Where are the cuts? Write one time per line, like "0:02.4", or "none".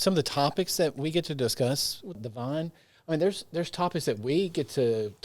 0:02.2

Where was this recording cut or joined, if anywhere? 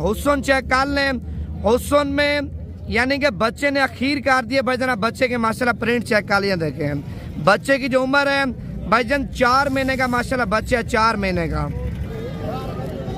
none

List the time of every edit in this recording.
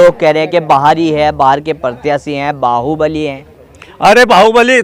none

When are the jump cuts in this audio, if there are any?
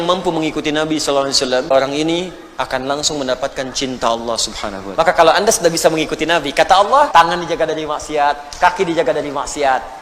0:01.7
0:04.8
0:07.1

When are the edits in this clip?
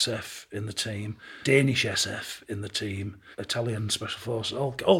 0:01.4
0:03.2

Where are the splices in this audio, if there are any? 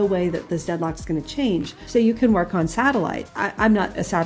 0:01.8
0:03.2

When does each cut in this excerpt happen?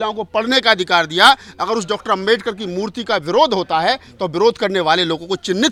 none

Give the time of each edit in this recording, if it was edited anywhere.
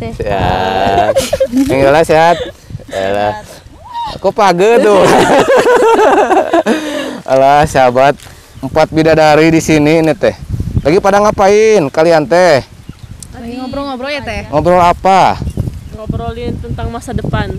none

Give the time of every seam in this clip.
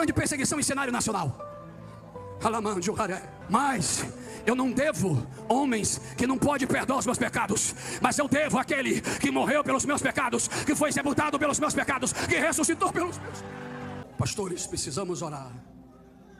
0:14.0

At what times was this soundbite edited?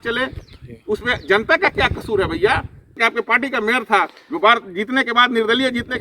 0:02.9

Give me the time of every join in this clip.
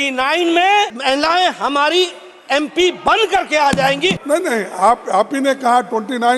0:01.0
0:04.2

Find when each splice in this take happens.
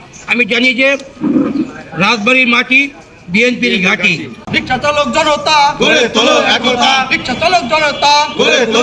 0:04.5

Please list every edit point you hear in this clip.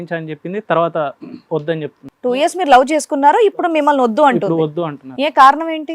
0:02.0

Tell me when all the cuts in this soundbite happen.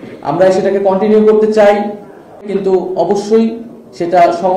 0:02.5

